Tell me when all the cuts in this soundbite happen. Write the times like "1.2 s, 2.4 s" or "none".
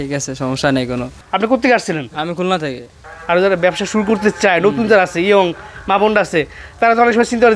1.2 s